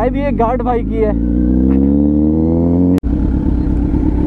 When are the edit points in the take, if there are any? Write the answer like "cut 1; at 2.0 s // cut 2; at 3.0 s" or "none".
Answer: cut 1; at 3.0 s